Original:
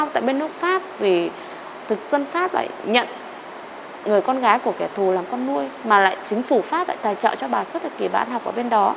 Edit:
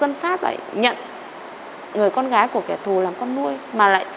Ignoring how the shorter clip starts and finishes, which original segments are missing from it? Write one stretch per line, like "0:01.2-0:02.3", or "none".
none